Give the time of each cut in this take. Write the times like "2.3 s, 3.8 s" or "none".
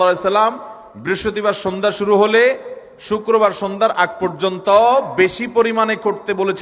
none